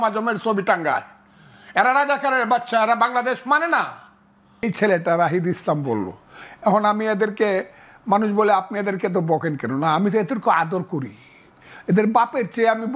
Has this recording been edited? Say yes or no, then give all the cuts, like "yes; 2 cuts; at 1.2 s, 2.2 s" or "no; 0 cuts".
yes; 1 cut; at 4.6 s